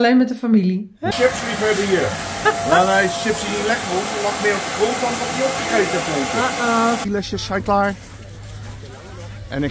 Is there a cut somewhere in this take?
yes; 2 cuts; at 1.1 s, 7.0 s

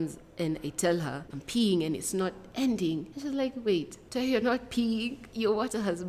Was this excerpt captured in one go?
no; 4 cuts; at 1.3 s, 3.1 s, 4.0 s, 5.2 s

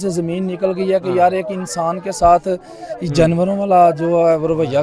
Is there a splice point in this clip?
no; 0 cuts

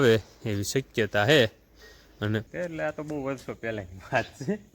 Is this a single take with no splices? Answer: no; 1 cut; at 2.5 s

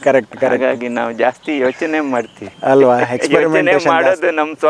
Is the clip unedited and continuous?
yes; 0 cuts

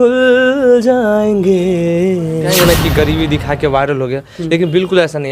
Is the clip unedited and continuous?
no; 1 cut; at 2.5 s

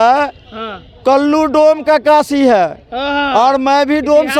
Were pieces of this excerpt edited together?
no; 0 cuts

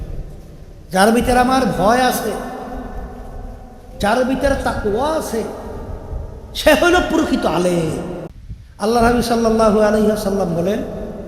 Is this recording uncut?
no; 1 cut; at 8.4 s

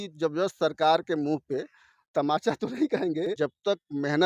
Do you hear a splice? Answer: yes; 1 cut; at 3.3 s

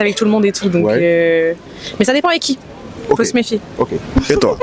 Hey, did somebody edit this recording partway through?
no; 0 cuts

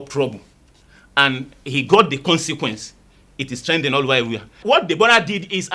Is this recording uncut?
no; 1 cut; at 4.6 s

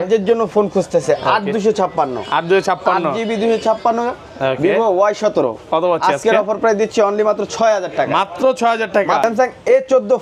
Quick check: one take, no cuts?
no; 1 cut; at 9.2 s

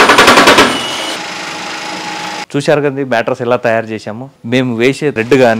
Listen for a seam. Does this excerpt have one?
no; 0 cuts

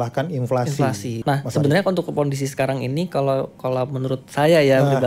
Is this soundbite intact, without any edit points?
no; 1 cut; at 1.1 s

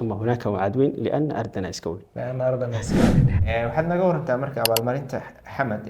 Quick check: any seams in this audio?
yes; 1 cut; at 3.3 s

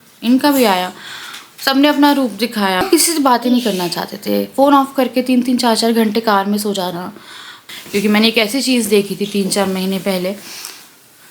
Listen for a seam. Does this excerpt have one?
yes; 2 cuts; at 2.8 s, 7.6 s

